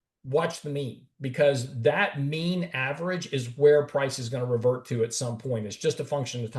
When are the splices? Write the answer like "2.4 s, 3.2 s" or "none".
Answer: none

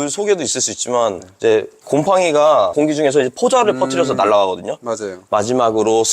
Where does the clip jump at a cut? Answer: 1.7 s, 2.7 s, 5.1 s

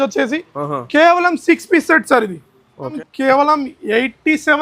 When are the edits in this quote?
3.0 s

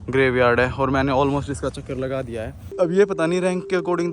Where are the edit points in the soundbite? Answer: 2.6 s

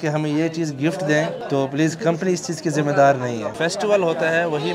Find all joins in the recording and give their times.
1.4 s, 3.5 s

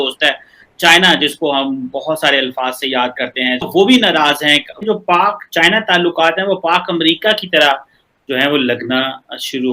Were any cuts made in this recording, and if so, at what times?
4.8 s

